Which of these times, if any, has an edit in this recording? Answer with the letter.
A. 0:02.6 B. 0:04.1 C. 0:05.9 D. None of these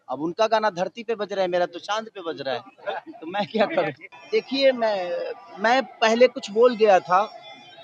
B